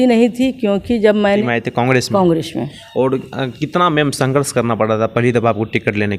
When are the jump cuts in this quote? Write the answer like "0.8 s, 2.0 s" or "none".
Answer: 1.4 s